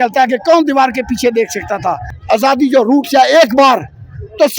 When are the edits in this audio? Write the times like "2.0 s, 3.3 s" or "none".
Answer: 2.1 s